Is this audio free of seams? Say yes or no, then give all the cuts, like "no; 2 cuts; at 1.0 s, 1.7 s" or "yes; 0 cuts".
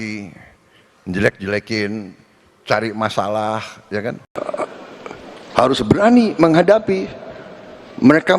no; 1 cut; at 4.2 s